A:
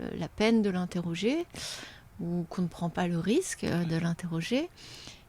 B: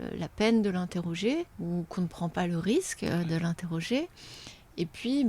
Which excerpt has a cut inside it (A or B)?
B